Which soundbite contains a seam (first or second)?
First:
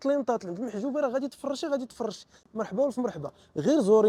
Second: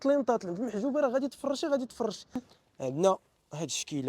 second